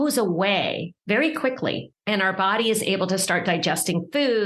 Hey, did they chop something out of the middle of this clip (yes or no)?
yes